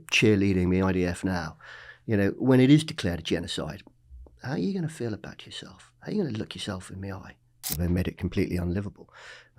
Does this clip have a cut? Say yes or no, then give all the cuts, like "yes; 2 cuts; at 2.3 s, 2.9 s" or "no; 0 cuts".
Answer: yes; 1 cut; at 7.8 s